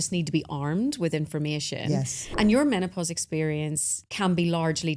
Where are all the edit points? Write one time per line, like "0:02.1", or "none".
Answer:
0:02.2
0:04.0